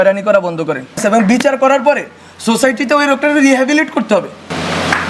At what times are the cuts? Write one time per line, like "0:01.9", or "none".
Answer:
0:01.0
0:04.1